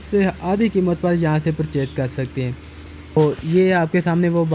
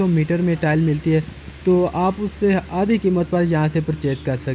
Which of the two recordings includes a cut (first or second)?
first